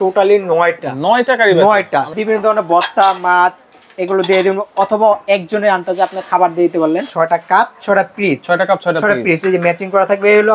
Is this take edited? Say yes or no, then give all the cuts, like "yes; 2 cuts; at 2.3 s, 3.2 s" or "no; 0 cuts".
yes; 2 cuts; at 2.2 s, 7.1 s